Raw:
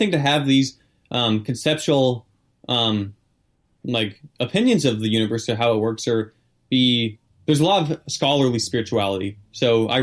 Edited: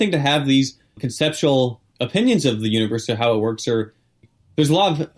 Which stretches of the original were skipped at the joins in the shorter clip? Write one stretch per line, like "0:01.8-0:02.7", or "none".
0:01.0-0:01.5
0:02.3-0:04.2
0:06.6-0:07.1

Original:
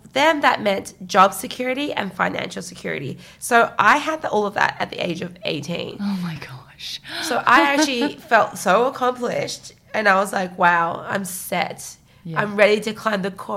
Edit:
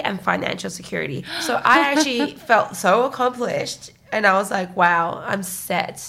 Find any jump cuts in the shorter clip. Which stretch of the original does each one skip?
0:03.2-0:07.1

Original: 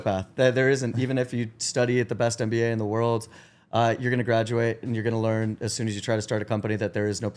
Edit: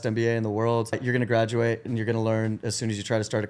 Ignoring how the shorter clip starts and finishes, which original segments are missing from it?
0:03.3-0:04.0

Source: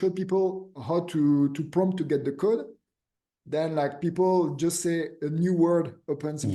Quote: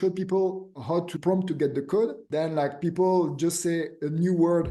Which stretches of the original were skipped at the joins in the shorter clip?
0:01.1-0:01.6
0:02.7-0:03.4

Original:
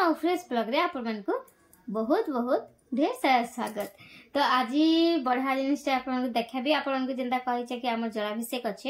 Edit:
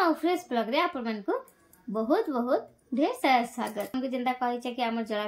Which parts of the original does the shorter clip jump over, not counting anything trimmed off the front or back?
0:04.0-0:07.0

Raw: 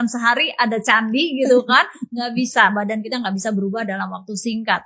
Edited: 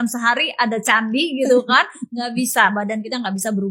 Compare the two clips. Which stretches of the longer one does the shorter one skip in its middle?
none

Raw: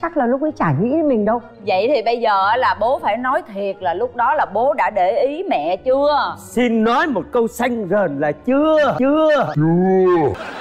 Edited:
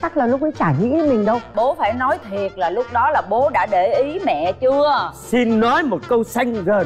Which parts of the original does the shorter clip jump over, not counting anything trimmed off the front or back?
0:01.5-0:02.8

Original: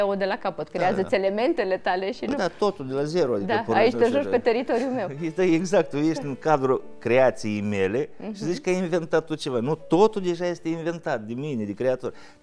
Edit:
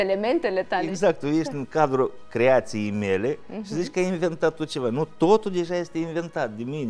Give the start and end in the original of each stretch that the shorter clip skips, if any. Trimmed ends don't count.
0:02.1-0:05.6

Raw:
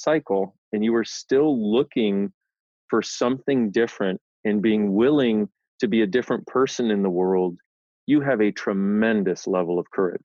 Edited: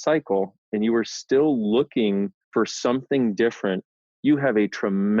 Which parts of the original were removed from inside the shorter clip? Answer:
0:02.4-0:02.8
0:04.3-0:07.7

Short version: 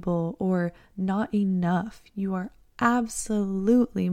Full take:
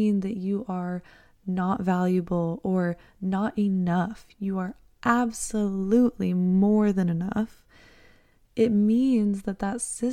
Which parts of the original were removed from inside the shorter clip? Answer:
none

